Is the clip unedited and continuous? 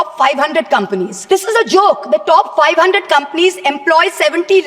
no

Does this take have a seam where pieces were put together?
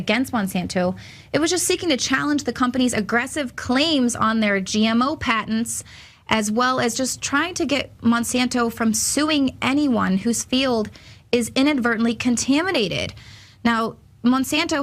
yes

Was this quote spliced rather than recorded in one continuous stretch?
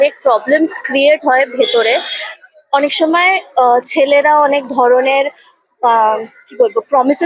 no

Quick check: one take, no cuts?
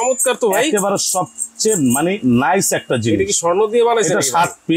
yes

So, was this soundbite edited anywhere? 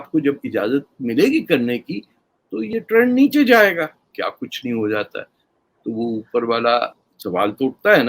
yes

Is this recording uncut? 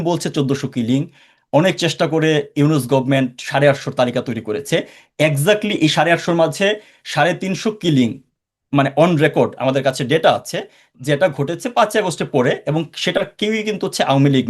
yes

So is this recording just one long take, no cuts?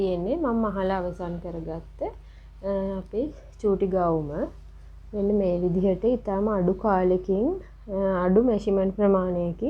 yes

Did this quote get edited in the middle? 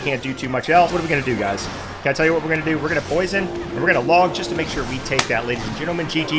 yes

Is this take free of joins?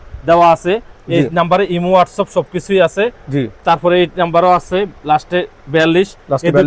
yes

